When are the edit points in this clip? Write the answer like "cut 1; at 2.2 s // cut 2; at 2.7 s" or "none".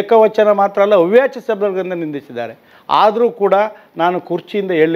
none